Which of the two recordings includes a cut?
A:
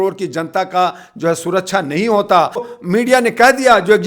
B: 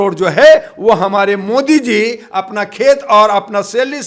A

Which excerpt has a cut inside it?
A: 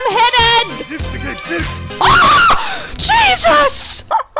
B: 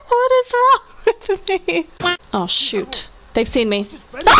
B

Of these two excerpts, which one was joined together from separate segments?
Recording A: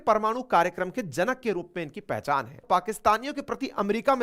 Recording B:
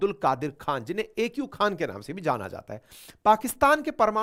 A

